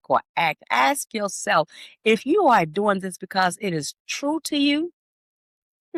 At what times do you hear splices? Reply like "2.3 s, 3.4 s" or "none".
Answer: none